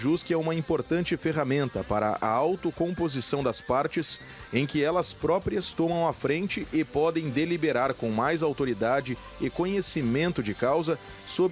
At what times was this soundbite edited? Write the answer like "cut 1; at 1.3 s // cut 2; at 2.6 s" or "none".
none